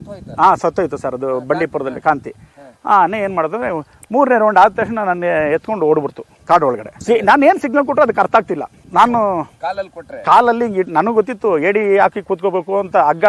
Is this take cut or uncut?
uncut